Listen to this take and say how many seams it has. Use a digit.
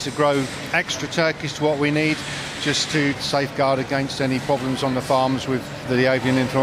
2